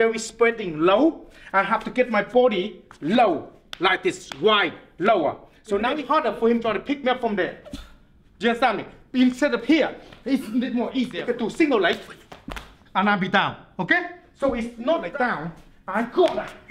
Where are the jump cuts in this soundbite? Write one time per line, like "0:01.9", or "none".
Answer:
0:05.9
0:11.2
0:15.1